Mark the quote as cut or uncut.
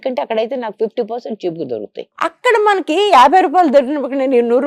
cut